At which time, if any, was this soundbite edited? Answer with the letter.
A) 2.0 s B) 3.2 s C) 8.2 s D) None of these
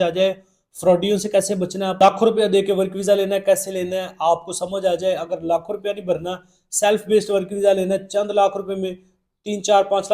A